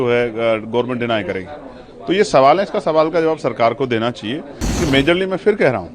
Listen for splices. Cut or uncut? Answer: cut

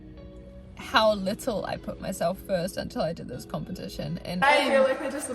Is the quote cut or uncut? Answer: cut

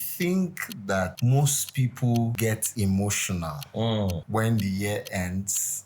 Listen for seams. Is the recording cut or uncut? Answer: cut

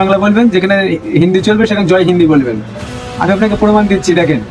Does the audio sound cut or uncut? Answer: uncut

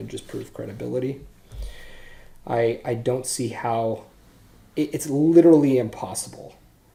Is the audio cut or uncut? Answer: uncut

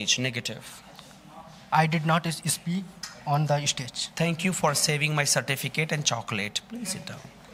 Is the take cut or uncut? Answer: uncut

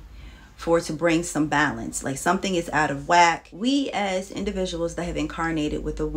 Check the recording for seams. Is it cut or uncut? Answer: cut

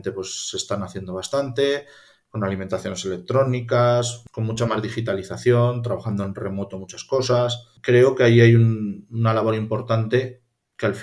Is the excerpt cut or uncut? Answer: cut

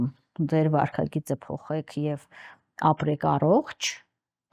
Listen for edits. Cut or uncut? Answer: uncut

